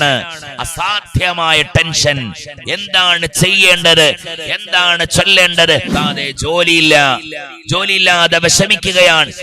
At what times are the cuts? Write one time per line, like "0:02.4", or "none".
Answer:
0:05.9